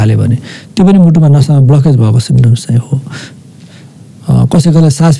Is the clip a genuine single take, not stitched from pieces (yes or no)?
yes